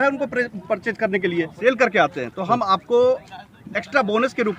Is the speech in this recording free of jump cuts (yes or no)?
no